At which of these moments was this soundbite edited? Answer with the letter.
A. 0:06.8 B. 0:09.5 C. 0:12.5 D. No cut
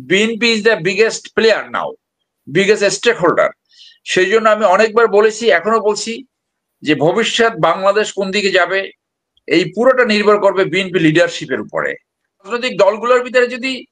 C